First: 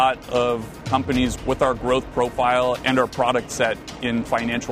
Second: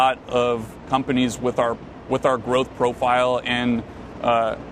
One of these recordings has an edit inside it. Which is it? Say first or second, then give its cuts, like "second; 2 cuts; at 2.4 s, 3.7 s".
first; 2 cuts; at 1.4 s, 2.8 s